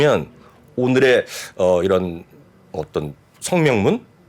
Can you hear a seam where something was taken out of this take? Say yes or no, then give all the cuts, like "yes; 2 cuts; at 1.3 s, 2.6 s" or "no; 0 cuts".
no; 0 cuts